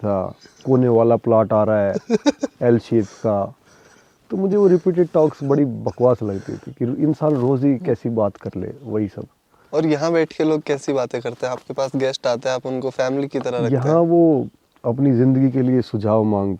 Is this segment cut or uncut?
uncut